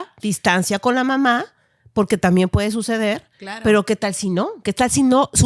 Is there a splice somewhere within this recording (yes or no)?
no